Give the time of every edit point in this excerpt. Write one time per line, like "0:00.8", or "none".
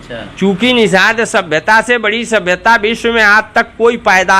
none